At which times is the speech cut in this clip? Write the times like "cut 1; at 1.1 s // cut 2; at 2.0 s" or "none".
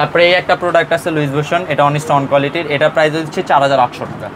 none